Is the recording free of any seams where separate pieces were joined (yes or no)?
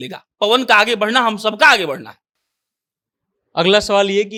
yes